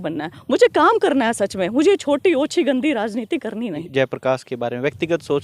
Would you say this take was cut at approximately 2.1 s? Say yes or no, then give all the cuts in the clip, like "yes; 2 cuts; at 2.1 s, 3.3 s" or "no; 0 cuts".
no; 1 cut; at 3.8 s